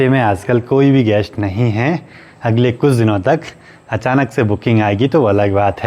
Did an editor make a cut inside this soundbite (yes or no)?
no